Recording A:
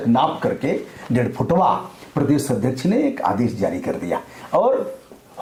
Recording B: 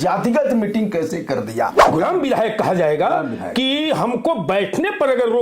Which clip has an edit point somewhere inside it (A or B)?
B